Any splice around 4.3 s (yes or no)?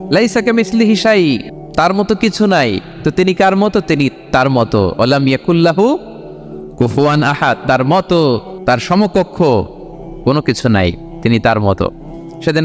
no